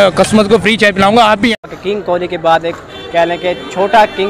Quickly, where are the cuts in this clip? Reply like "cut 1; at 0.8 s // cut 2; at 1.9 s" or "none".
cut 1; at 1.5 s